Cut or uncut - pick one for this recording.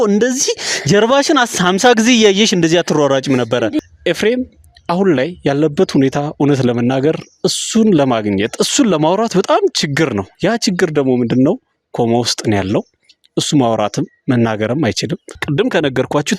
cut